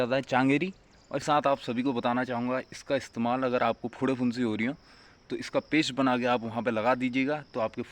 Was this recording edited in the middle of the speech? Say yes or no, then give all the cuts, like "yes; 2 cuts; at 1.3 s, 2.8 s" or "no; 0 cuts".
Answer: yes; 1 cut; at 1.2 s